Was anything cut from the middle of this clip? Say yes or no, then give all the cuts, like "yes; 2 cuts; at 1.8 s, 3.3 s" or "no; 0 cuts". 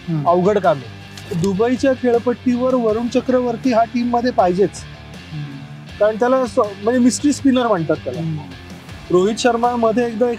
yes; 1 cut; at 1.3 s